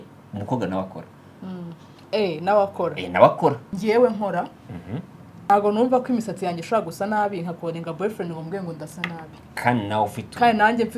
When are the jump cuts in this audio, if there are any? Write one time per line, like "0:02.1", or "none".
0:03.7
0:05.5